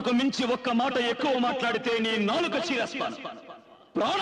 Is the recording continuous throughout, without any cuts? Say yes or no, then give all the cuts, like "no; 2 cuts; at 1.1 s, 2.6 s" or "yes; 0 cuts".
yes; 0 cuts